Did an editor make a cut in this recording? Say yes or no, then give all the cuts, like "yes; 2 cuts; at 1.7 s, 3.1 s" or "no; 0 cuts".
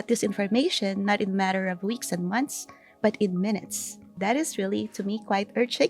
yes; 1 cut; at 4.2 s